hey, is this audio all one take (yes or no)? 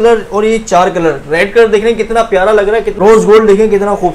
no